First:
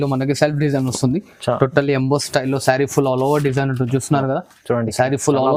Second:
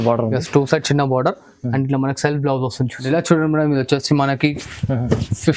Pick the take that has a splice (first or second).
second